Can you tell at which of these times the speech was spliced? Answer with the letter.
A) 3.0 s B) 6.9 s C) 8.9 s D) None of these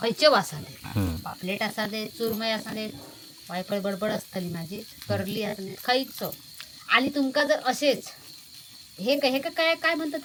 D